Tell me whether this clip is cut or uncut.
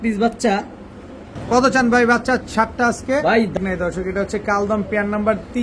cut